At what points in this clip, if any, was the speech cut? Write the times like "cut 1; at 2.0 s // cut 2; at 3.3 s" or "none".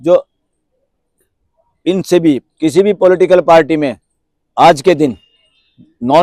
cut 1; at 2.4 s